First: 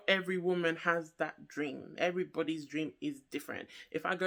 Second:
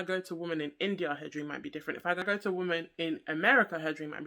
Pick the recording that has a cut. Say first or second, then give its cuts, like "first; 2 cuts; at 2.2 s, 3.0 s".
second; 1 cut; at 2.2 s